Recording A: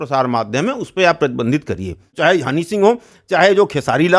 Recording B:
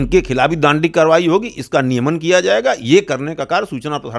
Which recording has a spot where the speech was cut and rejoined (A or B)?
A